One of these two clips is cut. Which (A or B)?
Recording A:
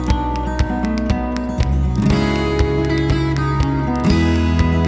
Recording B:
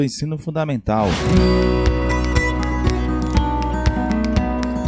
B